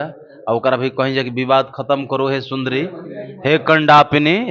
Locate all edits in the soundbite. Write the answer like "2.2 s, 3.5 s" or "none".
none